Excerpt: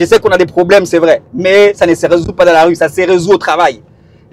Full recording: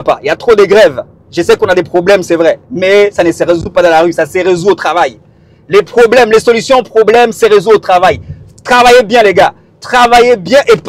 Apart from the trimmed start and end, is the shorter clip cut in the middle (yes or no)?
no